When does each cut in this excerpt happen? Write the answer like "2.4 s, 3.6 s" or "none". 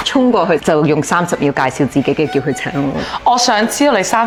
none